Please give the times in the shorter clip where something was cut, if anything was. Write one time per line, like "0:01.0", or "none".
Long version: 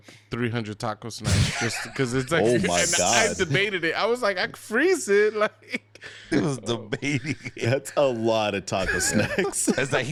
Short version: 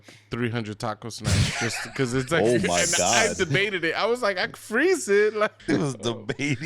0:05.6